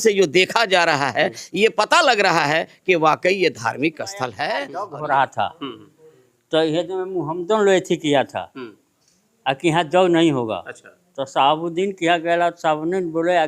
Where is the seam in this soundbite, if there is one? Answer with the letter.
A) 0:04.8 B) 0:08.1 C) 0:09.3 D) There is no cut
A